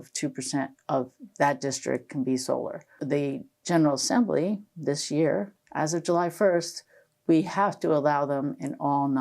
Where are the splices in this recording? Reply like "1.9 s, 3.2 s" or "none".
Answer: 5.6 s